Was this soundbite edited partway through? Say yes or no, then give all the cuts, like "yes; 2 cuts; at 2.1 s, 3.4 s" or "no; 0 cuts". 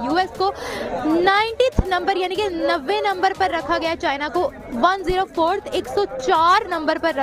no; 0 cuts